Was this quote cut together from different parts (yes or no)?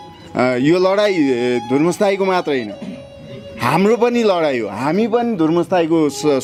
no